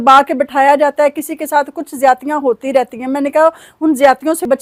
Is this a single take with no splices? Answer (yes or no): yes